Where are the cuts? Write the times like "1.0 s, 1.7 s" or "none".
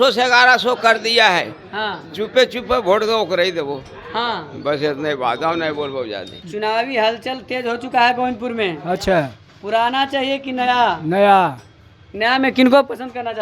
none